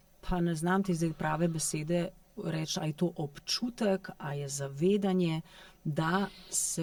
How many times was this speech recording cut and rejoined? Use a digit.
0